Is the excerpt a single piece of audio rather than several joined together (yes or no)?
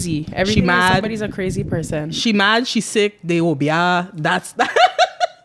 yes